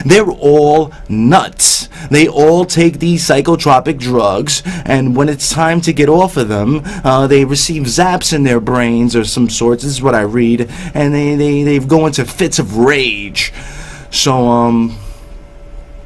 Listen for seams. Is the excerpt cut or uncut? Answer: uncut